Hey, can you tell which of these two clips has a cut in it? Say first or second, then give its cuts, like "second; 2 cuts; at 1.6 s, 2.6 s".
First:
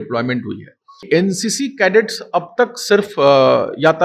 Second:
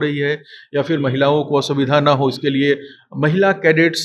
first; 1 cut; at 1.0 s